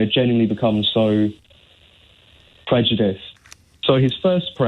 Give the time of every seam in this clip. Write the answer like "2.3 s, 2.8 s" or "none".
3.3 s